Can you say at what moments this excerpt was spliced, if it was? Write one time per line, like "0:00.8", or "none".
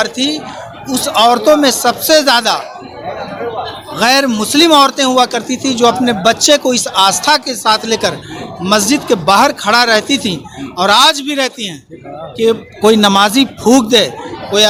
none